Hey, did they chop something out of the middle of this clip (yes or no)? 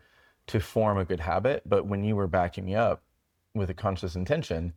no